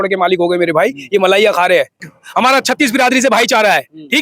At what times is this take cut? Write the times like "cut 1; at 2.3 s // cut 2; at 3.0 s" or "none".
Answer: cut 1; at 2.1 s